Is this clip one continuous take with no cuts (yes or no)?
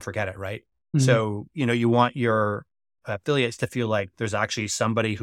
yes